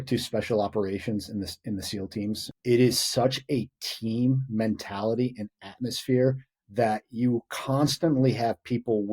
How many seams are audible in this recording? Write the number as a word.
one